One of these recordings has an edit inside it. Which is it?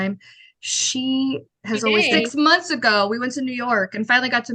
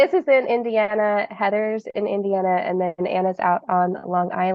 first; 1 cut; at 2.1 s

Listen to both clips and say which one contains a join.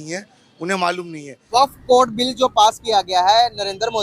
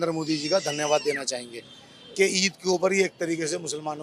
first; 1 cut; at 1.3 s

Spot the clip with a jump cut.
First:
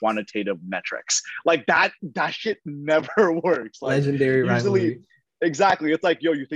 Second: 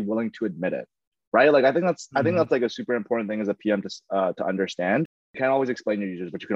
second; 1 cut; at 5.3 s

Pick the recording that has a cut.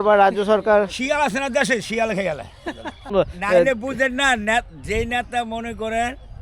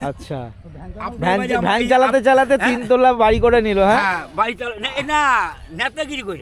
first; 1 cut; at 3.1 s

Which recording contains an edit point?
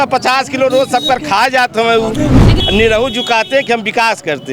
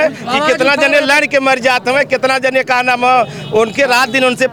first; 1 cut; at 2.5 s

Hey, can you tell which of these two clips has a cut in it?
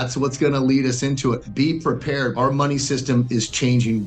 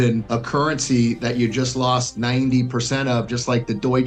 first; 2 cuts; at 1.4 s, 2.3 s

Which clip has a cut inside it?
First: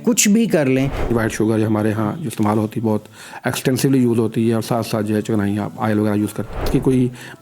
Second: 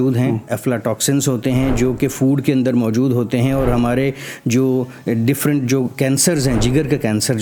first; 2 cuts; at 1.1 s, 6.6 s

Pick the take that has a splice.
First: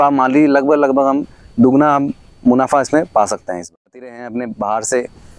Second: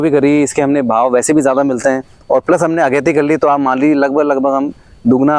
first; 1 cut; at 3.7 s

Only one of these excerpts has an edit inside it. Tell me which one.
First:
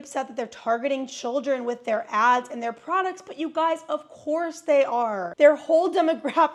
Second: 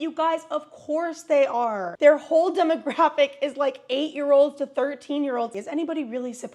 second; 1 cut; at 5.5 s

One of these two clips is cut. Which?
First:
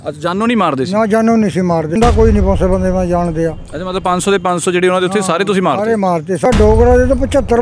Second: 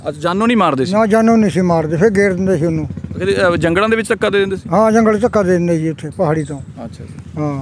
first; 2 cuts; at 2.0 s, 6.4 s

